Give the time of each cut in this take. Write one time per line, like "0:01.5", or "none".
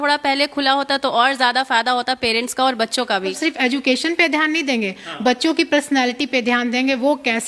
0:03.4